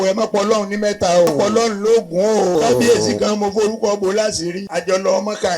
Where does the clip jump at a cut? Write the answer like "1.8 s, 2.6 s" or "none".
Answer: 1.3 s, 2.5 s, 4.6 s